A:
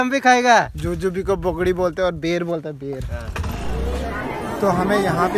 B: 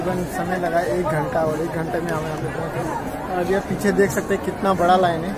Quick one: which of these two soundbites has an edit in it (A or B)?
A